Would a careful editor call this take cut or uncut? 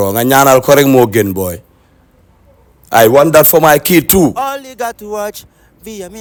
uncut